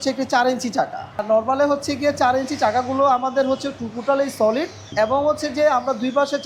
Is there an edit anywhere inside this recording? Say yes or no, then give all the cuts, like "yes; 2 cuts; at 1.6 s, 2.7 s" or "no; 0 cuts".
yes; 2 cuts; at 1.2 s, 4.8 s